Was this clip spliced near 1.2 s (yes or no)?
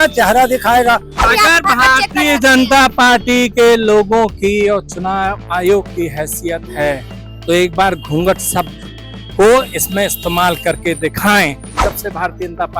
yes